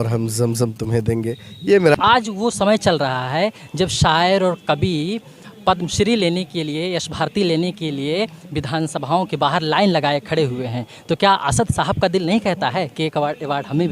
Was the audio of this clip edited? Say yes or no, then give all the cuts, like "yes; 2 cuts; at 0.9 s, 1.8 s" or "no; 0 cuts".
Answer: yes; 1 cut; at 1.9 s